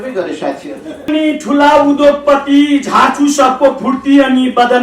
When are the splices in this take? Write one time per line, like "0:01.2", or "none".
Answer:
0:01.0